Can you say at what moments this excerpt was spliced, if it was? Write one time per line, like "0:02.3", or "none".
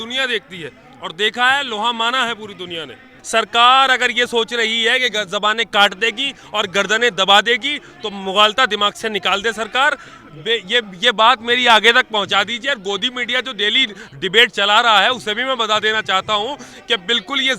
0:03.2